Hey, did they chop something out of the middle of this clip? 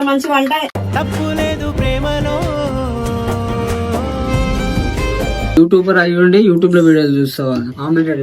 yes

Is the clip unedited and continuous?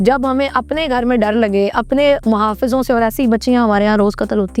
yes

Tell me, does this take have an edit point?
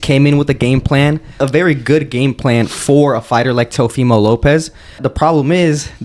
yes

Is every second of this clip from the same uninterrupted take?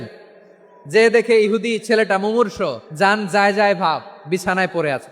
no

